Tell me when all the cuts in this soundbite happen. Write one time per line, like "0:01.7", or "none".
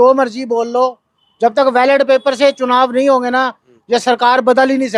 none